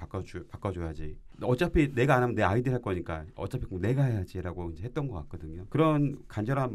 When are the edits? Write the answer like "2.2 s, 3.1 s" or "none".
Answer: 1.3 s, 5.5 s